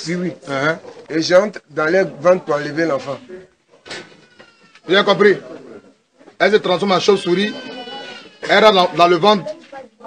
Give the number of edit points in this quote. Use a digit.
1